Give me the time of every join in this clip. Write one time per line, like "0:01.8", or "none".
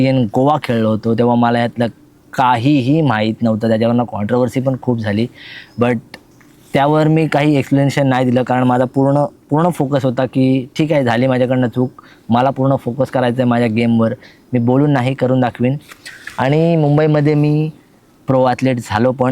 none

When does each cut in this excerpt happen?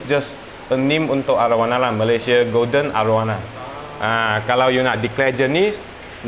none

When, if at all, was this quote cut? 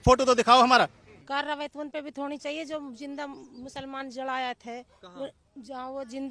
0:01.1

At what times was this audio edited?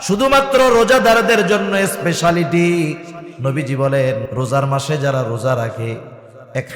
0:04.3

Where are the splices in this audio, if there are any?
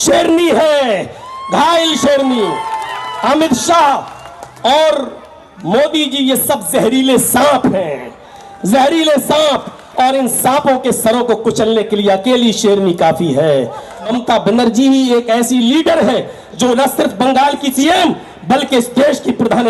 0:14.1
0:17.7

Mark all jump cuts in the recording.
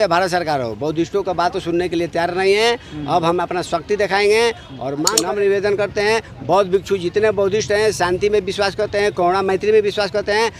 0:05.1

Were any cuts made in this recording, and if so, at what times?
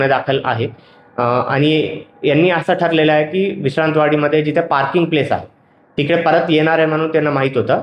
none

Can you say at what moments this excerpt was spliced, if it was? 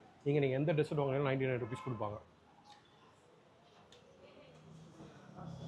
none

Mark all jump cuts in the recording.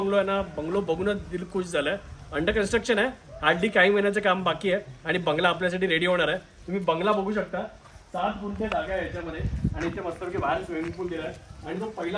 none

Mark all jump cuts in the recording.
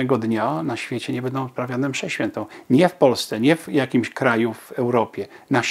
none

